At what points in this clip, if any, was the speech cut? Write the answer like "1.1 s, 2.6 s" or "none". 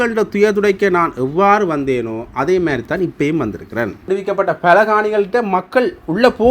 4.0 s